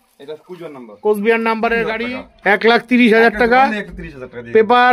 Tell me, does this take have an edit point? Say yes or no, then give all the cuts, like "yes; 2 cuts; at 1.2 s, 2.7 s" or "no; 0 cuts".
yes; 1 cut; at 2.0 s